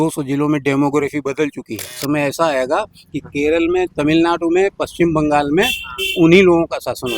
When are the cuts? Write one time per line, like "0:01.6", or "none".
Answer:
0:02.0